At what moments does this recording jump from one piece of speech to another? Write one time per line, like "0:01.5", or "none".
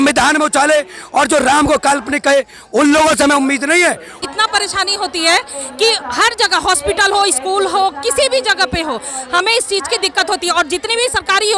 0:04.2